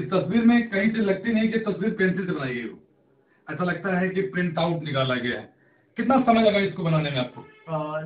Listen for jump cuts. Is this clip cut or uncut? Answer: uncut